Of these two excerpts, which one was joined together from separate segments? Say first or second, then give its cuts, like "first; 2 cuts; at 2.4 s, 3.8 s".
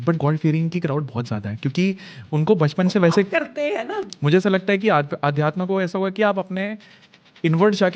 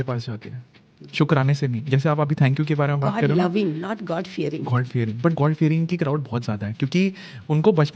first; 1 cut; at 4.0 s